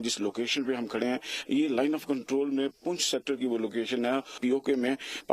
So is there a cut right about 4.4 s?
yes; 1 cut; at 4.4 s

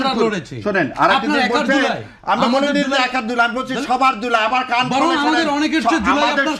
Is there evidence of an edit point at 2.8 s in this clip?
no; 0 cuts

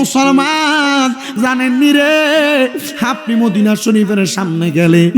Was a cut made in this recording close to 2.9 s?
no; 1 cut; at 1.3 s

